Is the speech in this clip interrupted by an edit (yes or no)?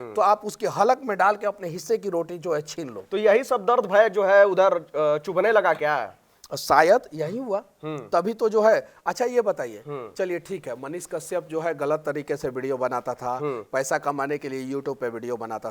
no